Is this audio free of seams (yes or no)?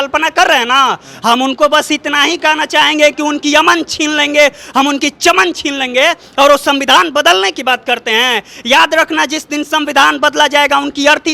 yes